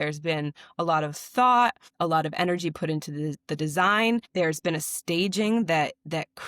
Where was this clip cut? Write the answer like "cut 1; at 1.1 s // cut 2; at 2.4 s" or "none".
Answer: cut 1; at 1.9 s